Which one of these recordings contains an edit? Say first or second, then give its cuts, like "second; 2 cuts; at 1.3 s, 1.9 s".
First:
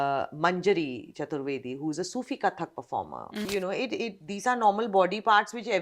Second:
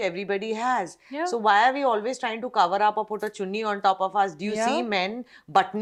first; 1 cut; at 3.5 s